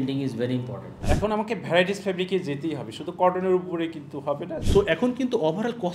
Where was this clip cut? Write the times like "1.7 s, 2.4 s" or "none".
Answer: 1.0 s, 4.5 s